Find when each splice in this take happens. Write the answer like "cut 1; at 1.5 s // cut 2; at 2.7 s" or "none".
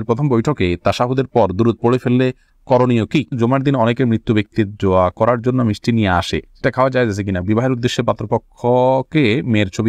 cut 1; at 3.3 s // cut 2; at 7.4 s